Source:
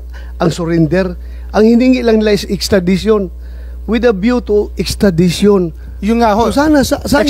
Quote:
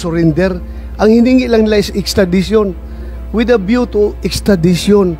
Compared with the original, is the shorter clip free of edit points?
yes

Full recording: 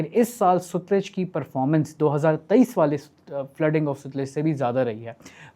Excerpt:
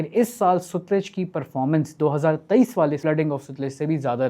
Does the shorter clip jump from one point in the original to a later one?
yes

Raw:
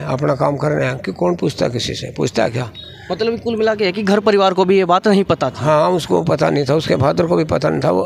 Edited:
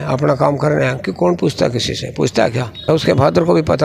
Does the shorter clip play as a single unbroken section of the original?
no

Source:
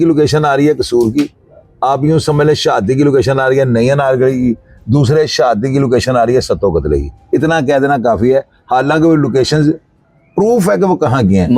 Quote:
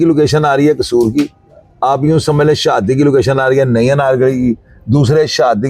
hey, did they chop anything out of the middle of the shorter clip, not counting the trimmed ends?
no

